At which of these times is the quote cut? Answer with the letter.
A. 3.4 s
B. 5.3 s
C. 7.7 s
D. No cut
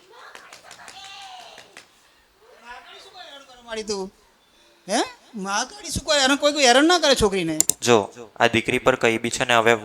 C